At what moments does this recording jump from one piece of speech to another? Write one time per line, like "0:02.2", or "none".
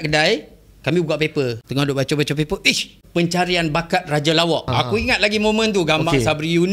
0:01.6
0:03.0
0:04.7